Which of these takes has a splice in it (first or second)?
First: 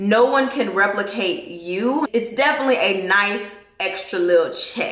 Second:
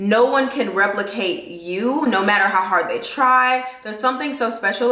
first